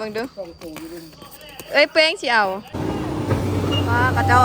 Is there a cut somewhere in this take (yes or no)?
yes